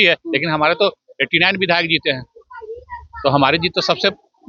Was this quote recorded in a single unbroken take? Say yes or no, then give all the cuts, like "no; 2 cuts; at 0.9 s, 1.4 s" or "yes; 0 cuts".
yes; 0 cuts